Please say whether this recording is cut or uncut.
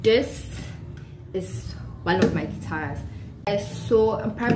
cut